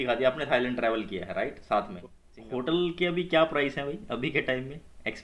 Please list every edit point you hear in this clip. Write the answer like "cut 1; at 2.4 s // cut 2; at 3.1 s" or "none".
cut 1; at 2.3 s